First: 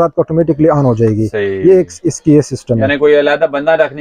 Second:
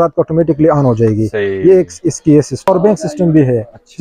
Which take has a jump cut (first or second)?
second